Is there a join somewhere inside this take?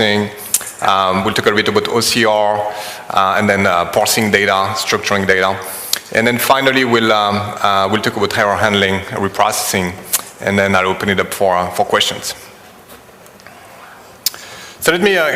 yes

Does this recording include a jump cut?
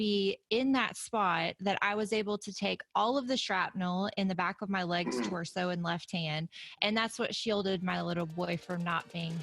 no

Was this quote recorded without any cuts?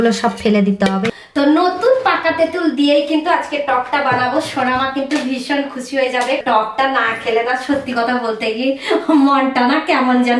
no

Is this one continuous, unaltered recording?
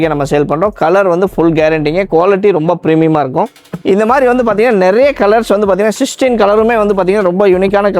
no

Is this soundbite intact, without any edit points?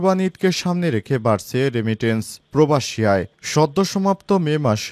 yes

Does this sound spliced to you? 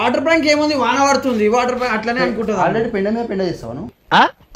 no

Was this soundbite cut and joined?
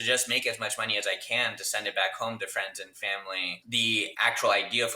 yes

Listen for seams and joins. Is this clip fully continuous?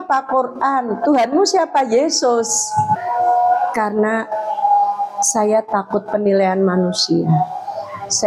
no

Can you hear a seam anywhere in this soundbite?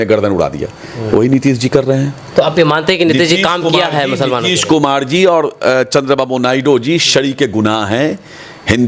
no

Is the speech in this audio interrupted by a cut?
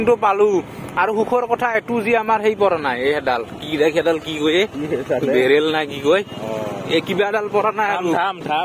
no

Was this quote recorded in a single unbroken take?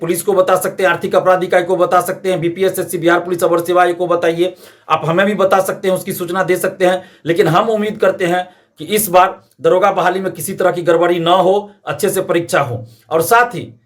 yes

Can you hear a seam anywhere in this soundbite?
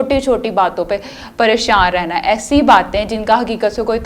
no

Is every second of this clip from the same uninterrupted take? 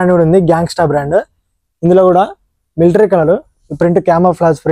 yes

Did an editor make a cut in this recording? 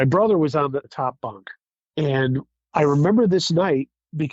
no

